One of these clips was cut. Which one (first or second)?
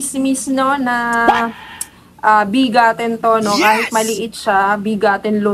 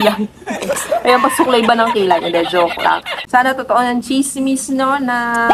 second